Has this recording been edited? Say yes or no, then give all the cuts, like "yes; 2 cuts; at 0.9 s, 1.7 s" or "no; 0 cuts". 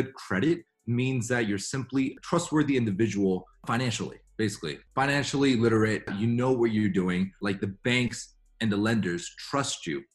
yes; 5 cuts; at 2.2 s, 3.6 s, 4.8 s, 6.1 s, 7.4 s